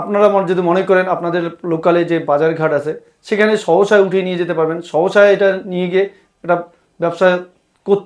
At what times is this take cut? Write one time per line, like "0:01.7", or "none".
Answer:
none